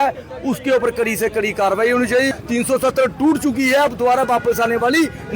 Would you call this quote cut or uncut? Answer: cut